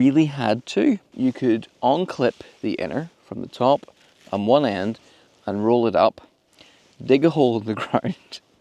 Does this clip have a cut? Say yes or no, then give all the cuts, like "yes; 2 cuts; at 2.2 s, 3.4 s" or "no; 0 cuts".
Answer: yes; 1 cut; at 1.1 s